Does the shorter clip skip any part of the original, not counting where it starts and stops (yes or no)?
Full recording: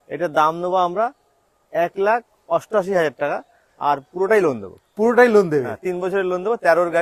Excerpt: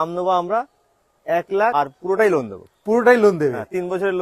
yes